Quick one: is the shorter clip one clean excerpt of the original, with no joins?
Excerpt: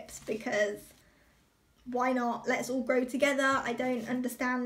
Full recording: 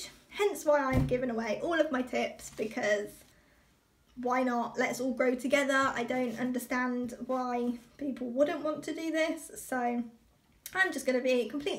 yes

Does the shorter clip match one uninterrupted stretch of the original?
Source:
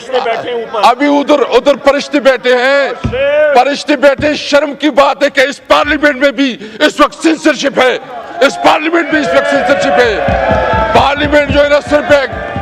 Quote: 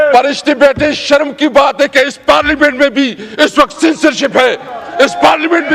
yes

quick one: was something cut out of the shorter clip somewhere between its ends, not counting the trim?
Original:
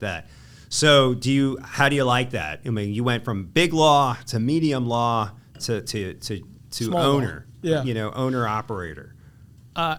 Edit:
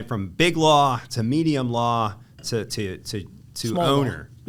no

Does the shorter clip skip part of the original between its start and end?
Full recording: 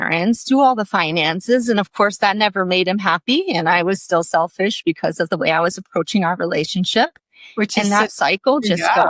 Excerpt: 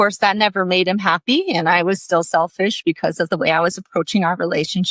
no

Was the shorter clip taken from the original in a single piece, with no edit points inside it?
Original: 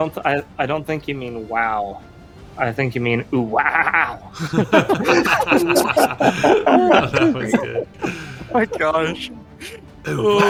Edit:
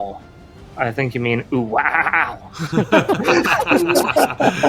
yes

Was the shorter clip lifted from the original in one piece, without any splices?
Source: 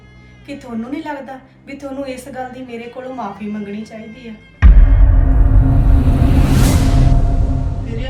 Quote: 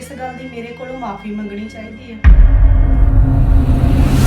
no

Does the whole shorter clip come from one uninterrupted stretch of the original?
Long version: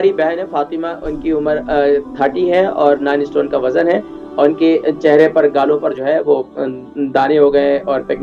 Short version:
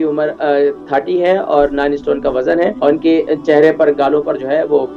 no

